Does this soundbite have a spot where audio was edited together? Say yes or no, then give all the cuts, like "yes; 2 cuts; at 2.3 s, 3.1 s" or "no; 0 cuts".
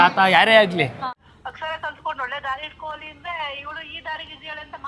yes; 1 cut; at 1.0 s